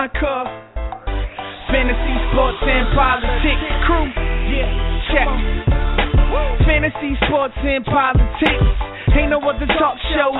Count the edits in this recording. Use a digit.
0